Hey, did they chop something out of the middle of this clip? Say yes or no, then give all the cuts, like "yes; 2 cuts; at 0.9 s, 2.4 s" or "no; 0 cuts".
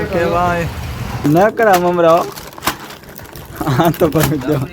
yes; 1 cut; at 1.2 s